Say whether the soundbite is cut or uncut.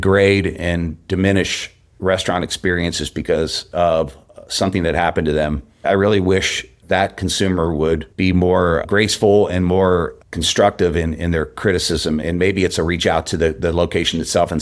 cut